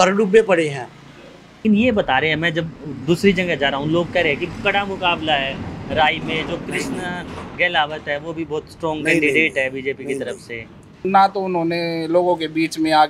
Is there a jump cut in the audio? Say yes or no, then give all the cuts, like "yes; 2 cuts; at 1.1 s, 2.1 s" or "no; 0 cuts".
yes; 2 cuts; at 1.6 s, 11.1 s